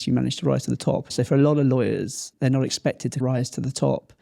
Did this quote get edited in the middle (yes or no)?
yes